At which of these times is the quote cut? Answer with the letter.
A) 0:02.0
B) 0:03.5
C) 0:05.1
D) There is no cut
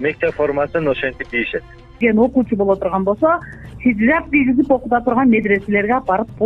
A